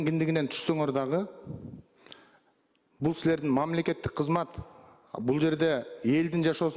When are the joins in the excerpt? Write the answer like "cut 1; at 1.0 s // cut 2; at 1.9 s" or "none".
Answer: none